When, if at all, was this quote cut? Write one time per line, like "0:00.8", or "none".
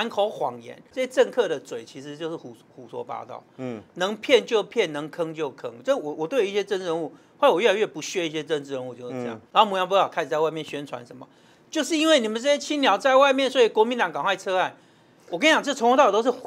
0:00.9
0:09.4